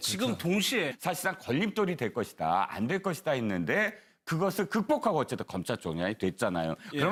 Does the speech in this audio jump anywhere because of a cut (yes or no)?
no